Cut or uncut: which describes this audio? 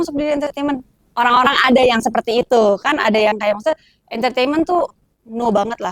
uncut